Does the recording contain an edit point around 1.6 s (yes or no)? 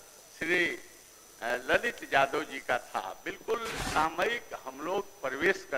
no